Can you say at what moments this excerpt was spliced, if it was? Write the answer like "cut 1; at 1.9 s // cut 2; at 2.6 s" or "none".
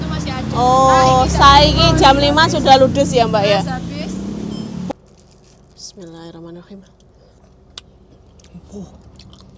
cut 1; at 4.9 s